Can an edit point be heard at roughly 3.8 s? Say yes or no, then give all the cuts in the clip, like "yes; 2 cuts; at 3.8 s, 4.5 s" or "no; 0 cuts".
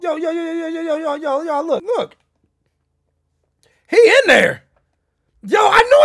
no; 1 cut; at 1.8 s